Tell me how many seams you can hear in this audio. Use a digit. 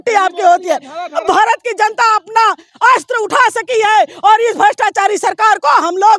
1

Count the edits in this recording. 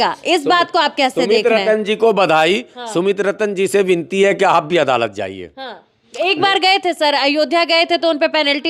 0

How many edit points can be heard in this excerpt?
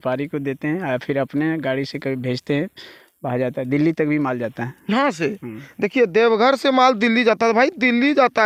0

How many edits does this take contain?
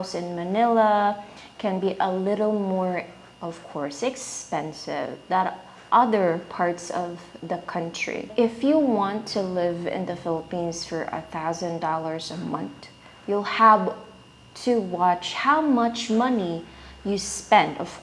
1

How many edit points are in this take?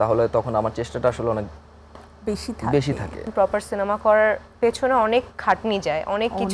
1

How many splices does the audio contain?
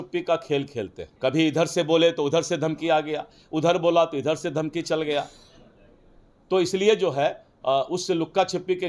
1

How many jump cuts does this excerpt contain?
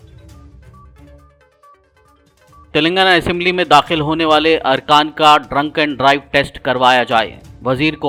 0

